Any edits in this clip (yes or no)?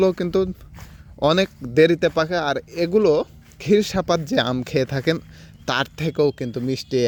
no